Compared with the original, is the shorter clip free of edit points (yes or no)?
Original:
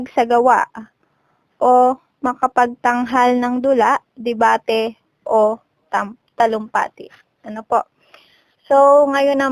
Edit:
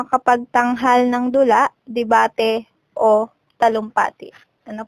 no